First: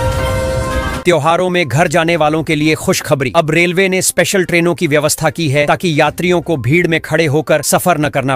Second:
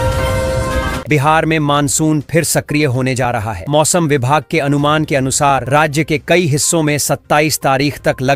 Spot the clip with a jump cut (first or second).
first